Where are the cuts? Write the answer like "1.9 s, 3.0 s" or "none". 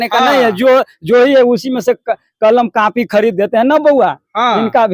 none

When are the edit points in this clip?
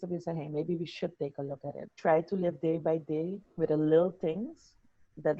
1.9 s

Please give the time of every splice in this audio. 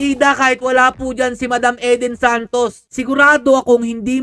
none

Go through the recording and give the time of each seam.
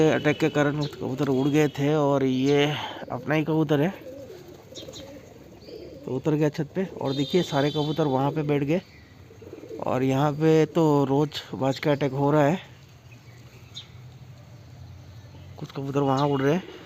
none

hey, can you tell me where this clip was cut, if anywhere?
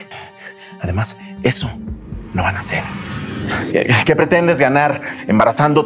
none

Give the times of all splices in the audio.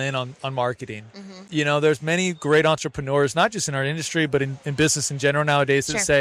none

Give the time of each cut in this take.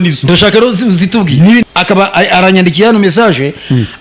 1.6 s

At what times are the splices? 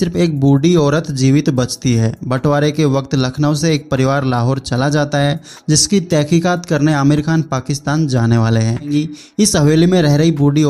8.9 s

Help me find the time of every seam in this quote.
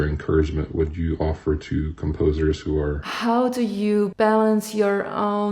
3.1 s, 4.1 s

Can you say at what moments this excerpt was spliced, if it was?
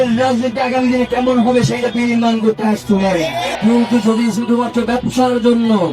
3.5 s

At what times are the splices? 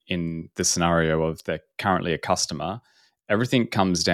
none

